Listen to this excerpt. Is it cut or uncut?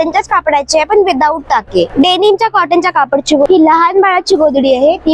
cut